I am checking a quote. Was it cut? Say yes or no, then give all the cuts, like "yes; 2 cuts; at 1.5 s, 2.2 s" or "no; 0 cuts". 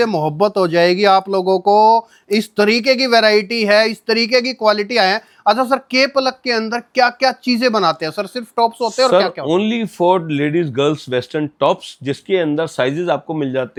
no; 0 cuts